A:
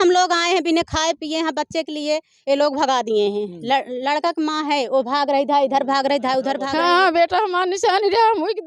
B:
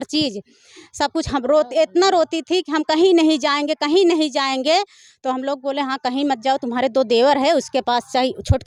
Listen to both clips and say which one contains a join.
A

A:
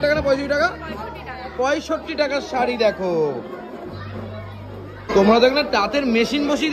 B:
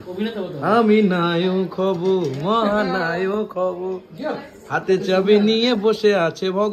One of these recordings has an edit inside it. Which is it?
A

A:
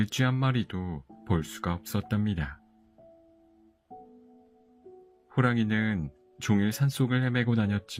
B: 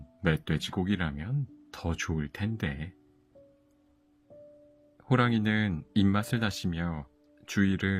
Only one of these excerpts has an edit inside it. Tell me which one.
B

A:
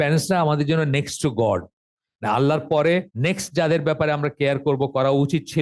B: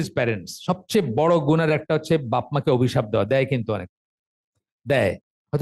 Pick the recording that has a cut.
A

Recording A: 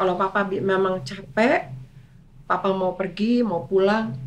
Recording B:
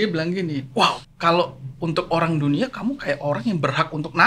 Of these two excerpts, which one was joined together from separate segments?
B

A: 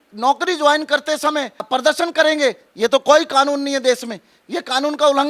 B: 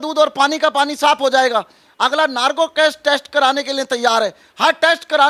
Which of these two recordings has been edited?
A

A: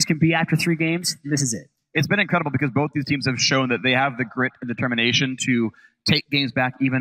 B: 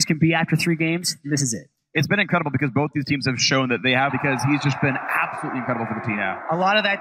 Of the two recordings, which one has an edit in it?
A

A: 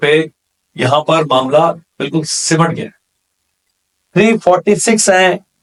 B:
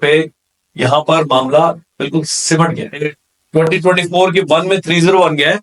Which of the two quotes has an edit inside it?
B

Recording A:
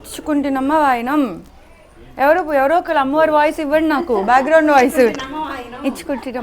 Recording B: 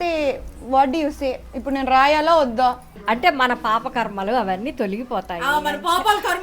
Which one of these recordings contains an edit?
B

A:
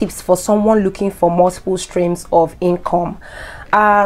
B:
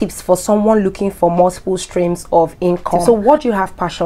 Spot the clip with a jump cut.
B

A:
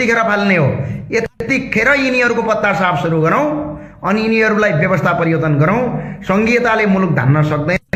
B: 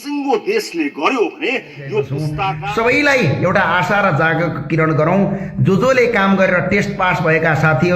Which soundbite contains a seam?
B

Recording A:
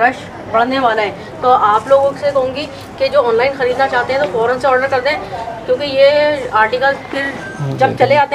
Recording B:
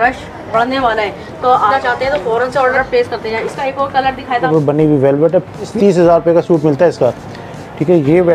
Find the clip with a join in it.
B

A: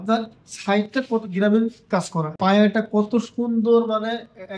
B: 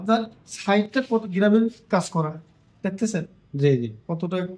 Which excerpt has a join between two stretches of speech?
A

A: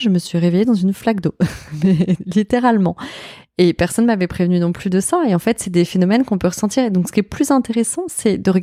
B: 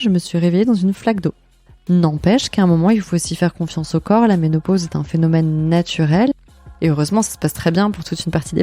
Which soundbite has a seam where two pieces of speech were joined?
B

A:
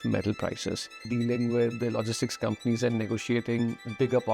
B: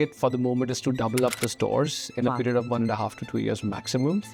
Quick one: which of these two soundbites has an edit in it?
A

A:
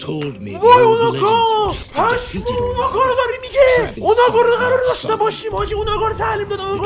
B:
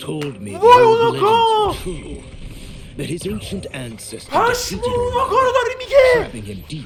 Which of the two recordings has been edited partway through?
A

